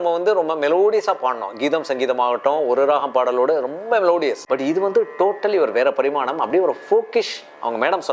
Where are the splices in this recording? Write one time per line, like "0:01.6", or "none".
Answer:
0:04.4